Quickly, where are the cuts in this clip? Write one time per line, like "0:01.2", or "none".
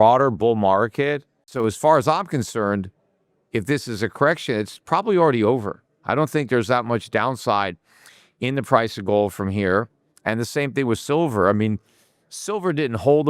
0:01.4